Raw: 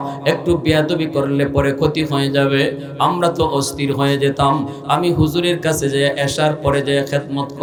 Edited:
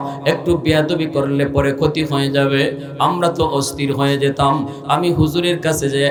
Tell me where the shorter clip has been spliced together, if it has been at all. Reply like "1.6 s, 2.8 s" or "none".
none